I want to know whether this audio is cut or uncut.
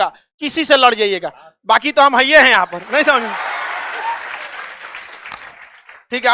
uncut